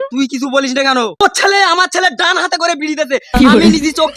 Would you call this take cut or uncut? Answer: cut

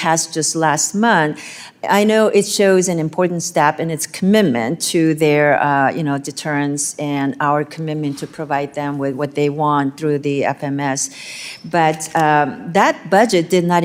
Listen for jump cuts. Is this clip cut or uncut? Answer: uncut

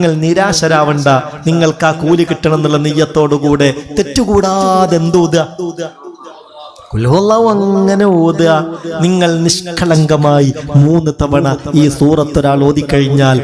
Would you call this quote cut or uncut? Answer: uncut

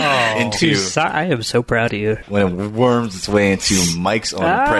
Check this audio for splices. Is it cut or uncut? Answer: cut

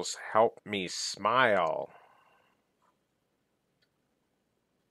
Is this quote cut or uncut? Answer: uncut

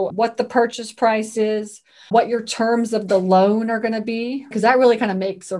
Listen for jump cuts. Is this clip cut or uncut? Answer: cut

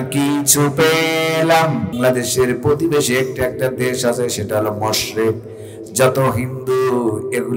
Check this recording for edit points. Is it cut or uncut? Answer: cut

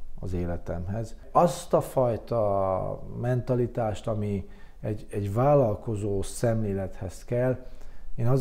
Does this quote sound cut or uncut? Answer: cut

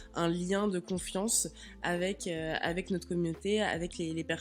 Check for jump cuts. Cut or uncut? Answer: uncut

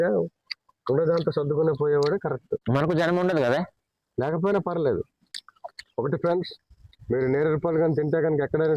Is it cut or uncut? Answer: cut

